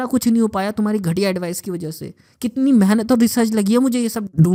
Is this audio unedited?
yes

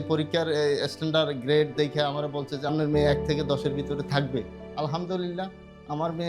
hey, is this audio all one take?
no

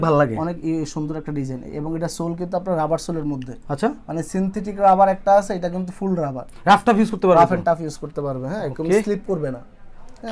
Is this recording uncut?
yes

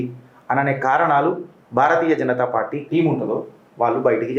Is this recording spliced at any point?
yes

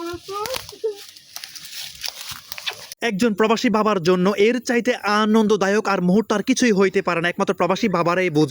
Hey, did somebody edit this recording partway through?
yes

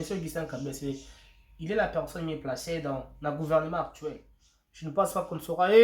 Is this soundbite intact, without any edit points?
no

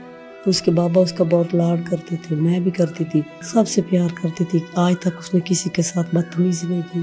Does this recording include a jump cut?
yes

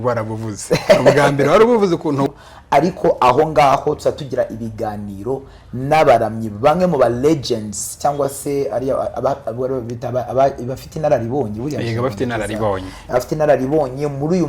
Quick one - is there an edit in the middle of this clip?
yes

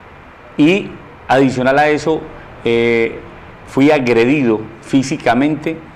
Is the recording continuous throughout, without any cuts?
yes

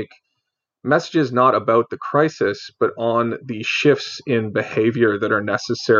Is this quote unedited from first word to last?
yes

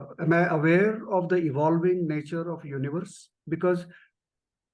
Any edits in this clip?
yes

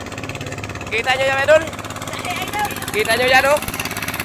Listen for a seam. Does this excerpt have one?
no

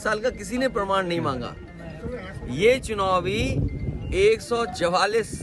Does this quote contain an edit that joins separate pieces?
no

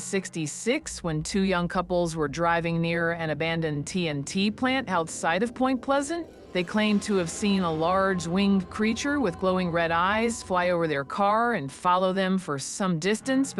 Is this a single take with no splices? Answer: yes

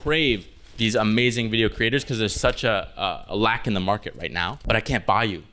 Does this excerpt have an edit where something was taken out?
yes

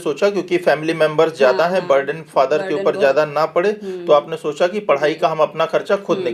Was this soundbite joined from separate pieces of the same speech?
no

